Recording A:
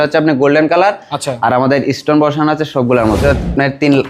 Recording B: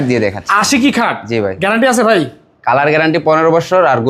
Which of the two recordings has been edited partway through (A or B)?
A